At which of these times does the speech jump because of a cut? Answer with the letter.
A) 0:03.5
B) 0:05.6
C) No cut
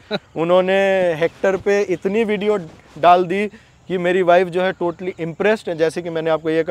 C